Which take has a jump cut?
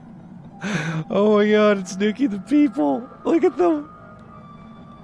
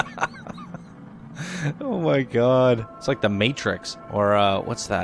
second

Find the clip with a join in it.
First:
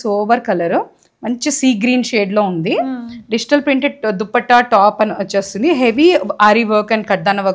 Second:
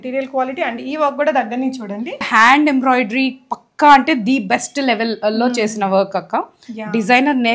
second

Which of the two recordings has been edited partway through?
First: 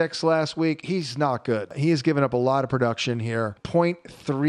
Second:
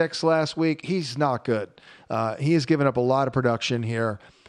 first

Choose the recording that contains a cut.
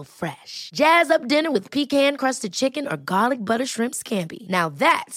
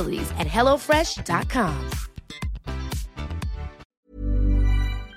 second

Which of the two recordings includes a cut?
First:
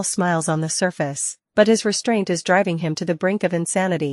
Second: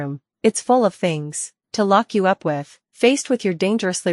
second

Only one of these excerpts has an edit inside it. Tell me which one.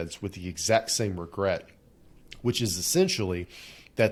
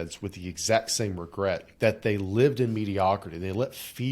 second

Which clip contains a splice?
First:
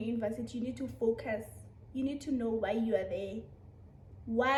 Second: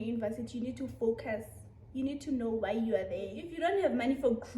second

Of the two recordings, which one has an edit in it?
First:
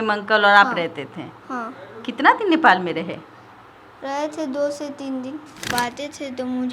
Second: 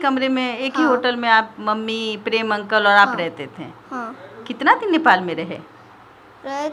first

